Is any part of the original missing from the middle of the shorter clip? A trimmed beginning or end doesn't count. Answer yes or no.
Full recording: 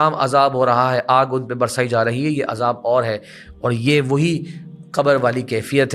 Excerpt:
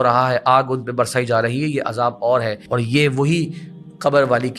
yes